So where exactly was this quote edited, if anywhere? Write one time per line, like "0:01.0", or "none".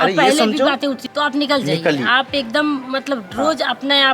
0:01.0